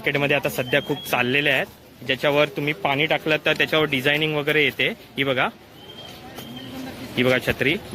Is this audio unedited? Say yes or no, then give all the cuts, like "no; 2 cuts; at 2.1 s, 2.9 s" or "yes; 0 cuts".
yes; 0 cuts